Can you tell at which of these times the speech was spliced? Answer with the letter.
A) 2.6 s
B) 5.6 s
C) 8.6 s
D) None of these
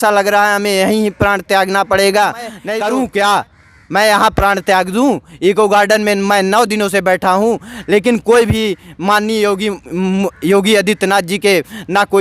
A